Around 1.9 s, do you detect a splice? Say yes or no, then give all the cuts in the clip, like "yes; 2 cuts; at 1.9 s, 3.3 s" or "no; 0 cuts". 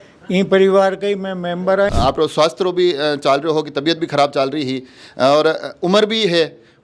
yes; 1 cut; at 1.9 s